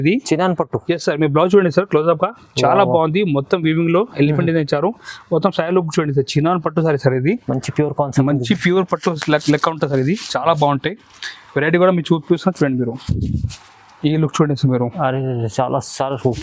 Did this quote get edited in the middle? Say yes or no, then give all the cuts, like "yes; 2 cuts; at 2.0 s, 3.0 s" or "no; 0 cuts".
no; 0 cuts